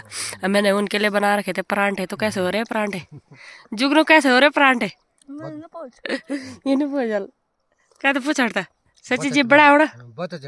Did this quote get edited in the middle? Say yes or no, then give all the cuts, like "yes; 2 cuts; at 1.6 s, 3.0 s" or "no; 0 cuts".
no; 0 cuts